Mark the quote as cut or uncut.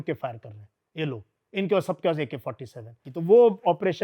cut